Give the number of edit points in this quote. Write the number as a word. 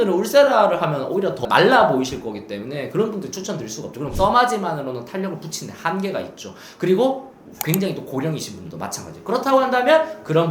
two